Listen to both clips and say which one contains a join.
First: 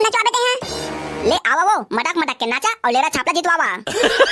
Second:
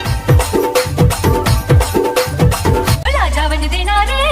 second; 1 cut; at 3.0 s

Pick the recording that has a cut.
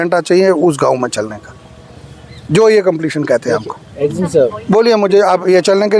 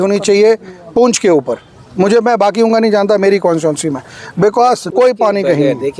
second; 1 cut; at 4.9 s

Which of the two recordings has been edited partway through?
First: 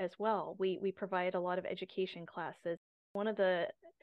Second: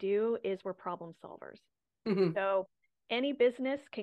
first; 1 cut; at 3.0 s

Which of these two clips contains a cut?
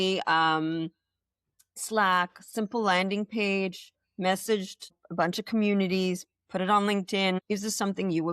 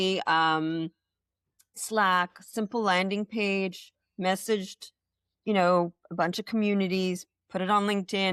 first; 2 cuts; at 5.0 s, 7.4 s

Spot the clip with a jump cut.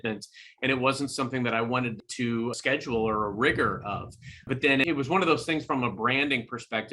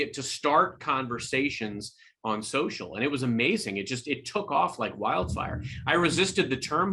first; 2 cuts; at 2.3 s, 4.5 s

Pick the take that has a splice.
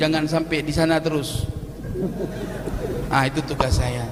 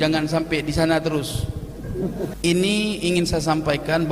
second; 1 cut; at 2.3 s

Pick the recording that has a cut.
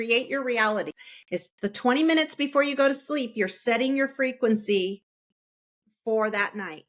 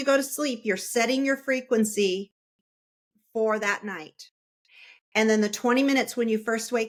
first; 1 cut; at 1.0 s

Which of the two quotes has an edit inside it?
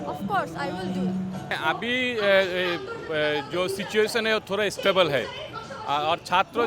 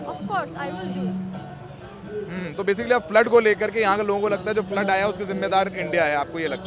first; 1 cut; at 1.6 s

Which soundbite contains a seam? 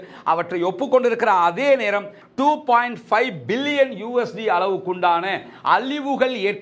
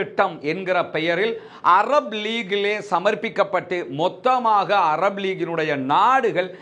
first; 1 cut; at 2.2 s

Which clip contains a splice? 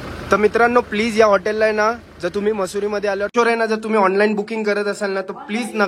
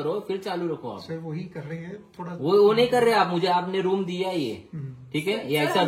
first; 1 cut; at 3.3 s

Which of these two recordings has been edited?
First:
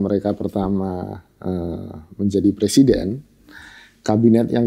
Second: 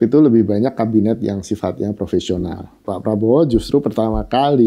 second; 1 cut; at 2.8 s

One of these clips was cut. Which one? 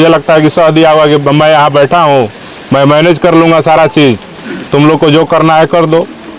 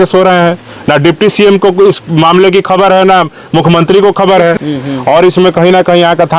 second; 1 cut; at 4.5 s

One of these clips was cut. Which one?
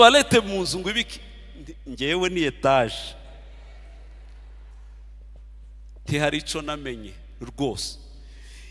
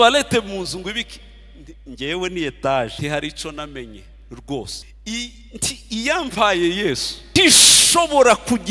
second; 3 cuts; at 2.9 s, 4.8 s, 7.4 s

